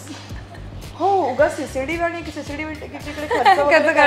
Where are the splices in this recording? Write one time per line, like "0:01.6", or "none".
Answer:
none